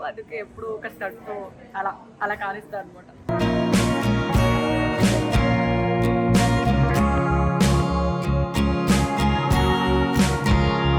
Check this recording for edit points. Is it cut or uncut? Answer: uncut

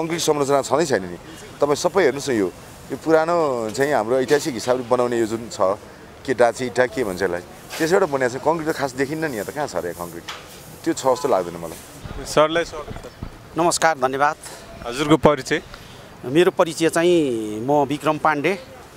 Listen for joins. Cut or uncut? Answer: uncut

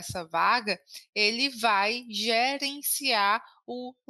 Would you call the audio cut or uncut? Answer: uncut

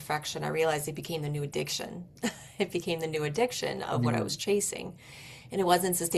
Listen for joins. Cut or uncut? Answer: uncut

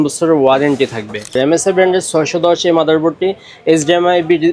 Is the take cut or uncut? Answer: cut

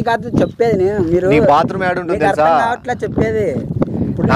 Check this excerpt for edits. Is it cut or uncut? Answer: uncut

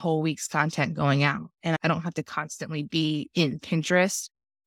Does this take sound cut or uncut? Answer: uncut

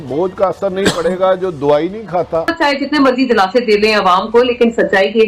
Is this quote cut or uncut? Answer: cut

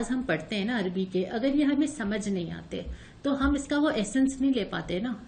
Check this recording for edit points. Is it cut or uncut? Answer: uncut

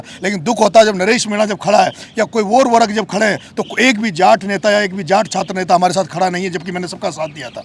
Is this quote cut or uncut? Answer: uncut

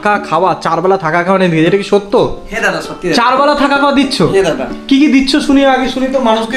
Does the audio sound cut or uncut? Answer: uncut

